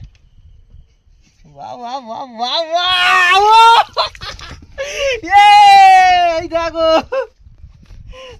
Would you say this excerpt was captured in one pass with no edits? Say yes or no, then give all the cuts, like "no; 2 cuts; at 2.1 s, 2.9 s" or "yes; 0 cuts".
yes; 0 cuts